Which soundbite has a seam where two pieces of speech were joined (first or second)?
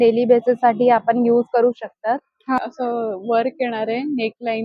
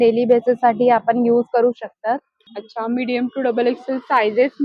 first